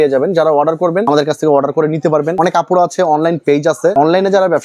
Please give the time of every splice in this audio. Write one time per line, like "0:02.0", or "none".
0:01.0
0:02.4
0:03.9